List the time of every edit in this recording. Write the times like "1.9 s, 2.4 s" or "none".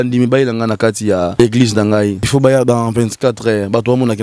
1.4 s, 2.3 s